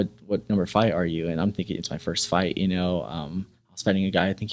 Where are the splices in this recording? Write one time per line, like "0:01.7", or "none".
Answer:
none